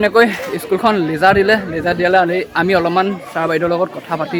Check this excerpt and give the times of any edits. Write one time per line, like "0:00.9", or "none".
none